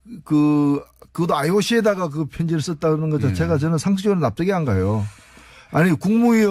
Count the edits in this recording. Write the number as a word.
one